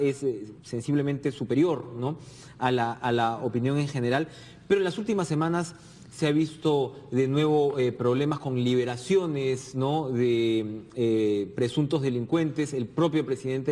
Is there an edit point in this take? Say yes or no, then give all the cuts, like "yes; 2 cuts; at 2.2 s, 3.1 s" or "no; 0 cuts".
yes; 1 cut; at 1.9 s